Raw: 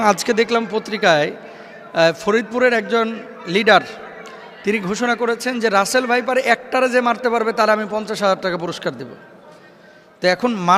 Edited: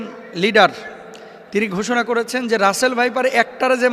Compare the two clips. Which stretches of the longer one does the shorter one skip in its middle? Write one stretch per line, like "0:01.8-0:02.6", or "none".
none